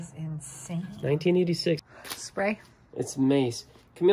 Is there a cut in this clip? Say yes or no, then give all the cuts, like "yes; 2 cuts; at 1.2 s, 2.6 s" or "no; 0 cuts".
yes; 1 cut; at 1.8 s